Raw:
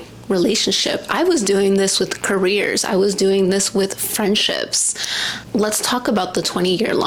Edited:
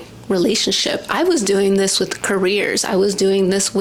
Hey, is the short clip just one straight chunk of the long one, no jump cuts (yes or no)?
yes